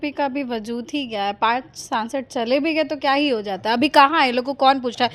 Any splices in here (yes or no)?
no